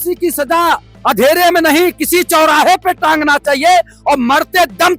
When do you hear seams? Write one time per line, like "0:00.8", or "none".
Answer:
none